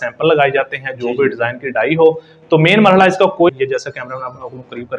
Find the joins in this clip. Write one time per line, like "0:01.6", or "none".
0:03.5